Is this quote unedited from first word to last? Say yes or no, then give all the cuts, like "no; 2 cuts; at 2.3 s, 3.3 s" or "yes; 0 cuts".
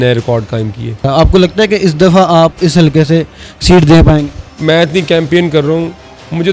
no; 2 cuts; at 1.1 s, 4.5 s